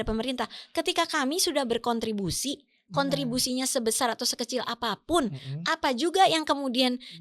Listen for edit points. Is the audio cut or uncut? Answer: uncut